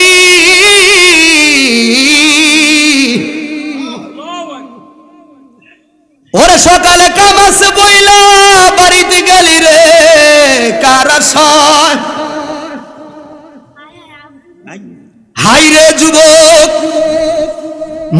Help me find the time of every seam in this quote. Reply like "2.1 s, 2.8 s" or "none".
none